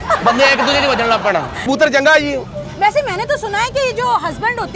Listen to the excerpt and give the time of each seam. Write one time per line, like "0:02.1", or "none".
0:01.6